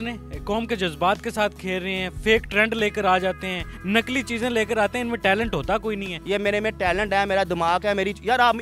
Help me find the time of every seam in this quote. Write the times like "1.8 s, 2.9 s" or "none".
3.7 s, 6.1 s